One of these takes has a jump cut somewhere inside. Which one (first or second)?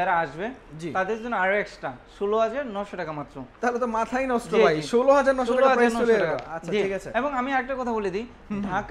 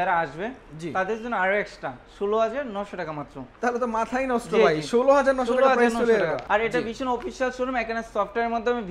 second